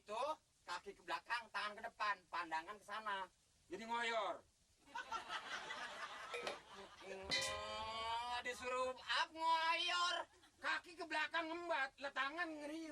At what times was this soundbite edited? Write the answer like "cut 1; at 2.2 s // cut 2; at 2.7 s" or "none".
none